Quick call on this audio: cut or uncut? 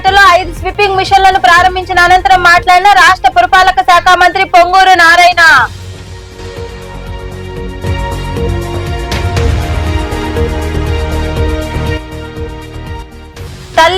uncut